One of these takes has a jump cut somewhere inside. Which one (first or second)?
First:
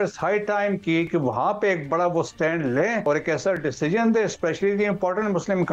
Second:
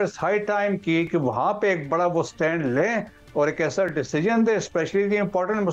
first